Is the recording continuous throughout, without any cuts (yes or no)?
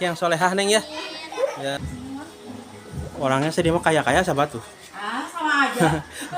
no